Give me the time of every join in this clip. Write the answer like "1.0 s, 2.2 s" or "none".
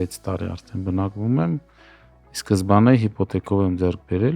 none